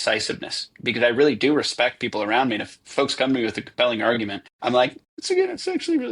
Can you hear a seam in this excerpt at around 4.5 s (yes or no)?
yes